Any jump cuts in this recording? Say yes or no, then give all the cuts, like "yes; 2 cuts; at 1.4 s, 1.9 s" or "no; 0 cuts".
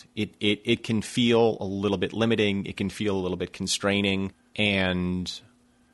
yes; 1 cut; at 4.4 s